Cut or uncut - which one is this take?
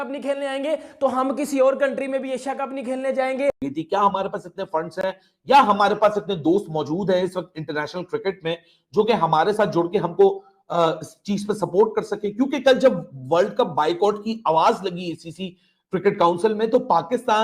cut